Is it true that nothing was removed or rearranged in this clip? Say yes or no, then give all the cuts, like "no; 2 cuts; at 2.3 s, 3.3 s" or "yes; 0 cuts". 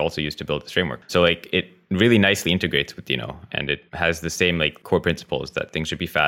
no; 3 cuts; at 1.0 s, 3.9 s, 4.8 s